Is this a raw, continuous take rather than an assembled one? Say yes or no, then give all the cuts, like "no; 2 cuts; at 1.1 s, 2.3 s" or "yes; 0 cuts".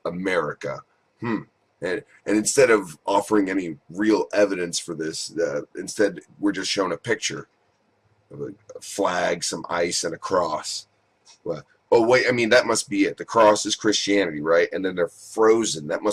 no; 1 cut; at 14.3 s